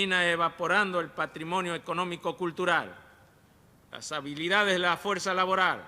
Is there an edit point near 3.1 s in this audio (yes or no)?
yes